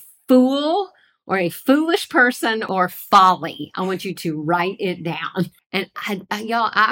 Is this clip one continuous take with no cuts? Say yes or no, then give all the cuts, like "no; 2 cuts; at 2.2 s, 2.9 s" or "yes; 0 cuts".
no; 2 cuts; at 2.6 s, 5.6 s